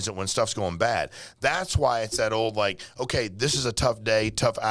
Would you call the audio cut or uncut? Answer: uncut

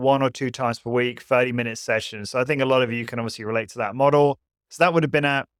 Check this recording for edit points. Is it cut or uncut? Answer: uncut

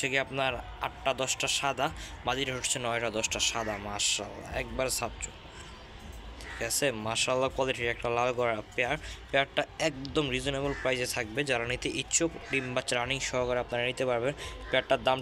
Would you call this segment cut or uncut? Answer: uncut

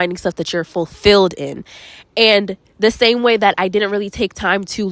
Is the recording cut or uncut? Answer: uncut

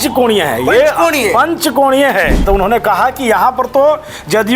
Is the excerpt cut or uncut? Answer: cut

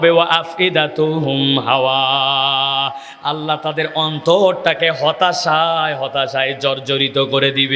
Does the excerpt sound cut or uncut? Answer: uncut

